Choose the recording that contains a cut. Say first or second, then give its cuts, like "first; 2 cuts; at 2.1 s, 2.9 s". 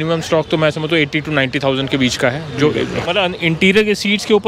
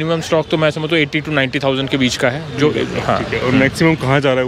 first; 1 cut; at 3.0 s